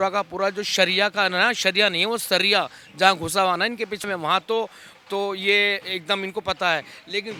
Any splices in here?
no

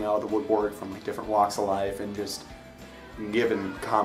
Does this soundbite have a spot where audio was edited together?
no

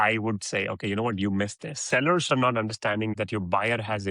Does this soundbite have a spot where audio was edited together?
yes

